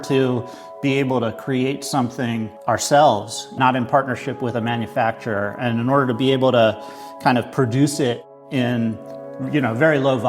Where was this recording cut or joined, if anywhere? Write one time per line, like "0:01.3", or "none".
0:08.3